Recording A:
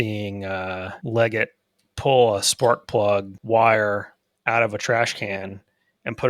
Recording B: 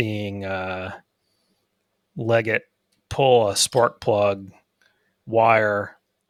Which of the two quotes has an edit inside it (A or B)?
A